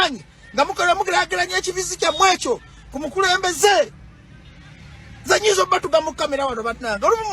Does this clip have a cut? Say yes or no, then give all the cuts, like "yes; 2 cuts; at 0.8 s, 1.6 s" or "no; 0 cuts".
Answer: yes; 1 cut; at 3.9 s